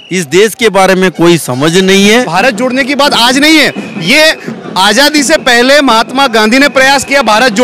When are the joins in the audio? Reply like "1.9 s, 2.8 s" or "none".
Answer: 2.3 s